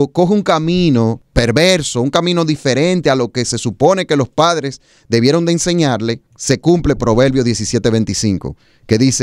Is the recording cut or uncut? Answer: cut